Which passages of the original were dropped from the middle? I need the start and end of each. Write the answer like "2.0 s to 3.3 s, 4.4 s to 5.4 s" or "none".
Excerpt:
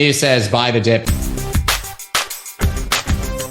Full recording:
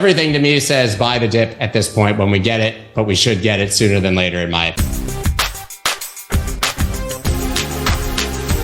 1.5 s to 4.8 s